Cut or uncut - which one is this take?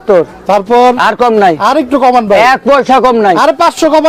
uncut